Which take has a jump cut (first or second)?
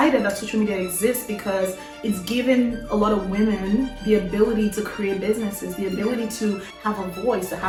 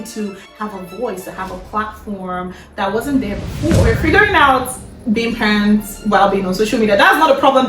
second